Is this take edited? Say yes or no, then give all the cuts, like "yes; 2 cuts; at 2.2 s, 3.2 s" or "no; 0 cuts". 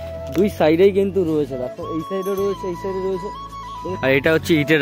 yes; 1 cut; at 3.8 s